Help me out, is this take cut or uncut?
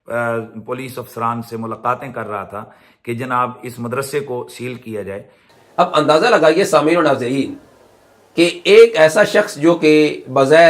uncut